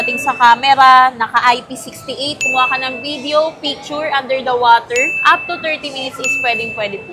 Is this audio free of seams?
yes; 0 cuts

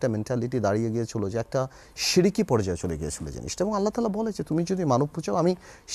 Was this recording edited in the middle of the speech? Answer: no; 0 cuts

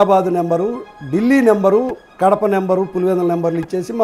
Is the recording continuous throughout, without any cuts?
no; 1 cut; at 2.0 s

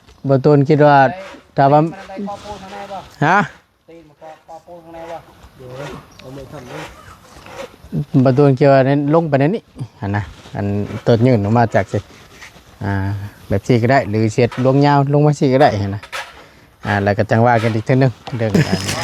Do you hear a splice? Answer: no; 0 cuts

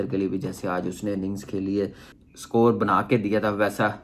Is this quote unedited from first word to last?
no; 1 cut; at 2.2 s

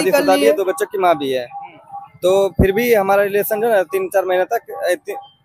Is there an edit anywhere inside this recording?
no; 0 cuts

